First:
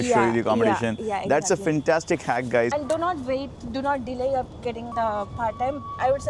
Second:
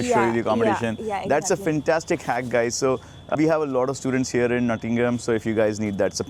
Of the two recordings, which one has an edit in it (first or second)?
first